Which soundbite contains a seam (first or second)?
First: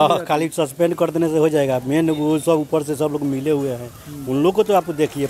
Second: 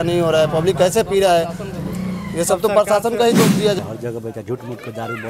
second